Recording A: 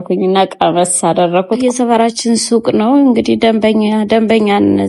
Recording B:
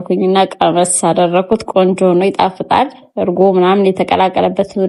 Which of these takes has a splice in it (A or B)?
A